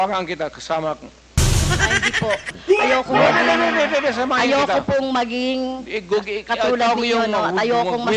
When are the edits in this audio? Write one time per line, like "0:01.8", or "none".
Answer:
none